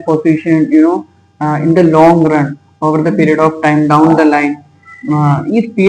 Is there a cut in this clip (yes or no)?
no